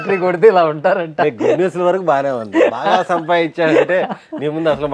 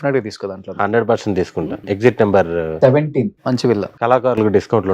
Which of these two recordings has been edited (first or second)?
second